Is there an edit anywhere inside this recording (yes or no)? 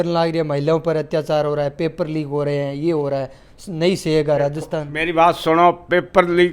no